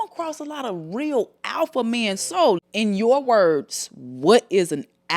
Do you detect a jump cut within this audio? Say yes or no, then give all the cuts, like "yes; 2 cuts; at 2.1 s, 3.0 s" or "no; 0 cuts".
yes; 1 cut; at 2.6 s